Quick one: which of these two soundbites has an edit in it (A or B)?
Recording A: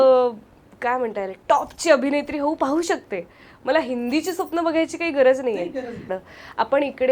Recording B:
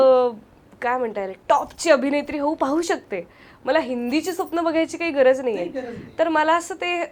A